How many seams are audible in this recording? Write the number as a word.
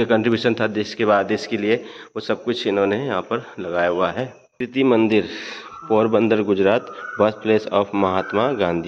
one